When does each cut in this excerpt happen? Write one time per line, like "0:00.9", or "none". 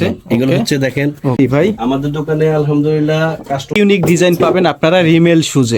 0:01.4
0:03.7